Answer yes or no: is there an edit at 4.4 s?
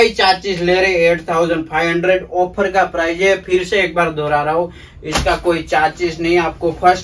no